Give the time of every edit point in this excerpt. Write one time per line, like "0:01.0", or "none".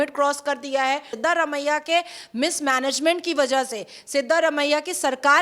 0:01.1